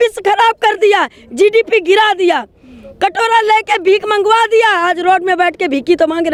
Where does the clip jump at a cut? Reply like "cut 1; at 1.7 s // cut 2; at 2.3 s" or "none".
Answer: none